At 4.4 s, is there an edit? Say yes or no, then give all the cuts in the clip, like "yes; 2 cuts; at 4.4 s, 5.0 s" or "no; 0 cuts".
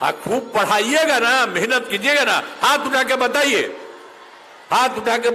no; 0 cuts